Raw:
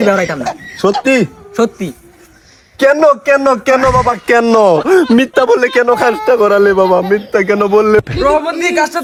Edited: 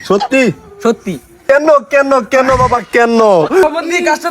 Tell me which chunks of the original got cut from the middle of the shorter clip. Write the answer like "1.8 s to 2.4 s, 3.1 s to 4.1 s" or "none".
2.1 s to 2.7 s, 5.0 s to 8.3 s